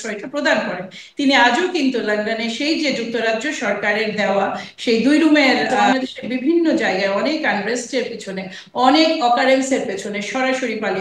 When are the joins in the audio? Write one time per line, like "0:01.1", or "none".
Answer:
0:05.9